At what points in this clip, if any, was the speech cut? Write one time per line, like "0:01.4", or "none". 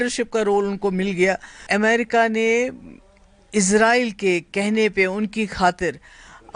0:01.6